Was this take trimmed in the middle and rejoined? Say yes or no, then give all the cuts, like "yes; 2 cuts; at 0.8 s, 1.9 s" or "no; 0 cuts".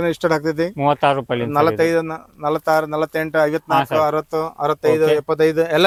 no; 0 cuts